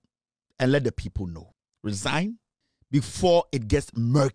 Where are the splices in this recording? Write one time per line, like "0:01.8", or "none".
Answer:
none